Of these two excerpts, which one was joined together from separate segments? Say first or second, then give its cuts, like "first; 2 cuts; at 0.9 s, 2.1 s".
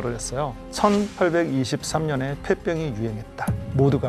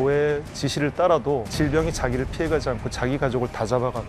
second; 1 cut; at 1.5 s